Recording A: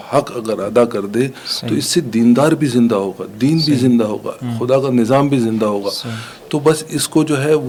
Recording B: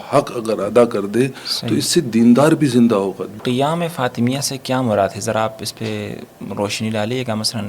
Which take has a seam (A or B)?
B